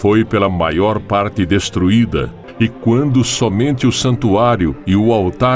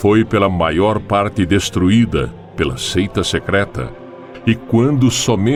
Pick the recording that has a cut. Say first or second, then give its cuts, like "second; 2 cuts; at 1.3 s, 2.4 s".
first; 1 cut; at 2.4 s